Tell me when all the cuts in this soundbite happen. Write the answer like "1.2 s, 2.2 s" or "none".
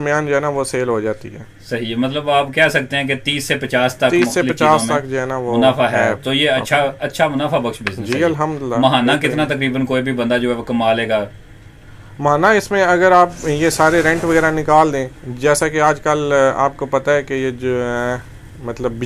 none

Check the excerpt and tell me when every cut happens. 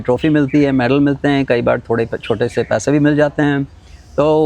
none

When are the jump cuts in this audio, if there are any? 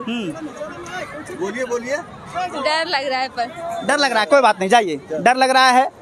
none

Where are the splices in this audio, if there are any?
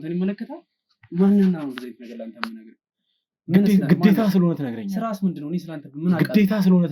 none

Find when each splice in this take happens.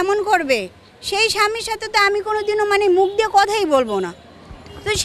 none

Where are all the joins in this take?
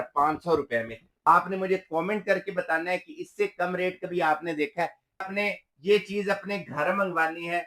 1.0 s, 5.3 s

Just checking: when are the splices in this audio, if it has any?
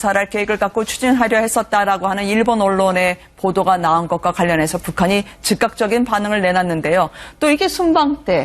4.7 s

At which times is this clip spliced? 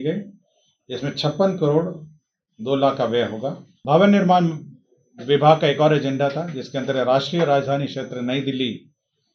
3.7 s

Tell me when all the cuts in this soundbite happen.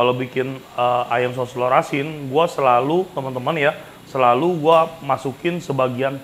none

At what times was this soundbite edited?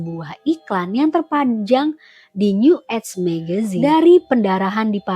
3.7 s

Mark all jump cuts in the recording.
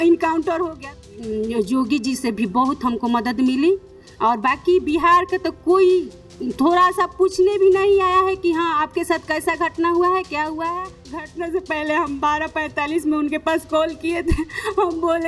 1.0 s, 11.2 s

